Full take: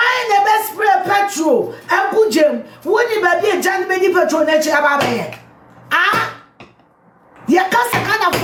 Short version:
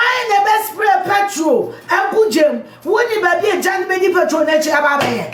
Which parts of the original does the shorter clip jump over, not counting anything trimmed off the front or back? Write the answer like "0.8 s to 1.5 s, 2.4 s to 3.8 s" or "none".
none